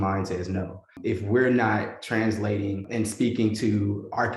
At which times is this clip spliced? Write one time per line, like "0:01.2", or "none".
0:01.0
0:02.8

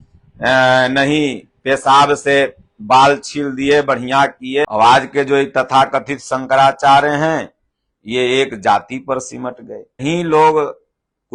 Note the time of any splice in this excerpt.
0:04.7
0:10.0

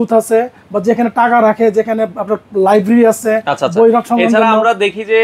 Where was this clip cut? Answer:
none

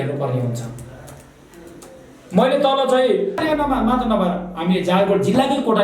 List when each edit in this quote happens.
0:03.4

